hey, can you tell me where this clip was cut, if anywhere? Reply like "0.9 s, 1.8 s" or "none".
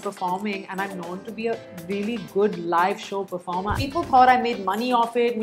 3.8 s